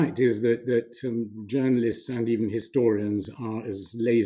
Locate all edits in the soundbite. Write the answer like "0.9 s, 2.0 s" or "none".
none